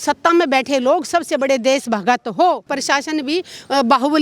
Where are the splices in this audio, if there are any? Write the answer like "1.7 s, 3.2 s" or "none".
2.7 s